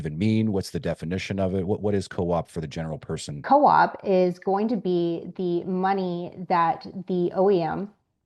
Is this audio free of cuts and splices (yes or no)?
no